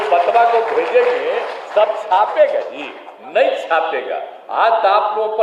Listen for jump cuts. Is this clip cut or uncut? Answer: uncut